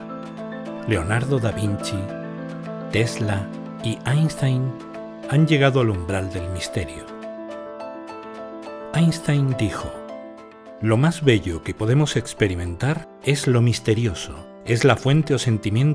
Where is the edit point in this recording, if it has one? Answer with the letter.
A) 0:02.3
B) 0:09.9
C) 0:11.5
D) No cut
A